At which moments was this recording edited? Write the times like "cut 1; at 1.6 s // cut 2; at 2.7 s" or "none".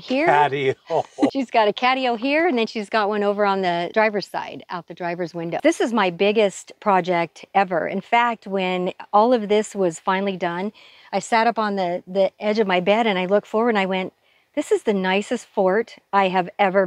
cut 1; at 1.3 s // cut 2; at 3.9 s // cut 3; at 5.6 s